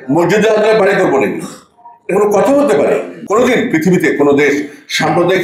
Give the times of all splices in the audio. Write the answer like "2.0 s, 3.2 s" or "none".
3.1 s